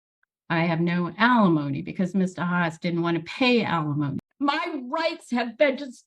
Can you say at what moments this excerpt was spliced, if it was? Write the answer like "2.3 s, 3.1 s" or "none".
4.2 s